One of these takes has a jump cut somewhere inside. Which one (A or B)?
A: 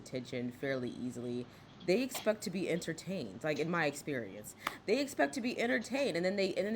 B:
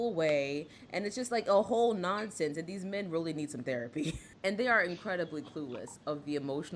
B